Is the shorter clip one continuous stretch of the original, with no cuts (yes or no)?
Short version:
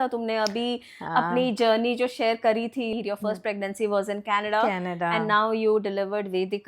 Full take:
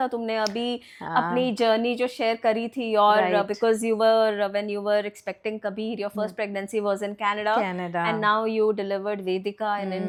no